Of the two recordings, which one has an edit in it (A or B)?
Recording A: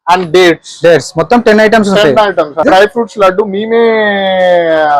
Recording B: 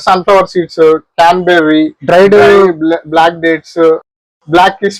A